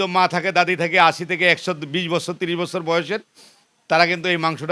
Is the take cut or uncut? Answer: uncut